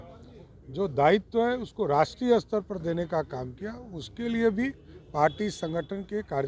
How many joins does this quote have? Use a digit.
0